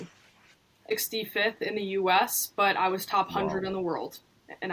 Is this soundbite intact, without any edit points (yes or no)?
no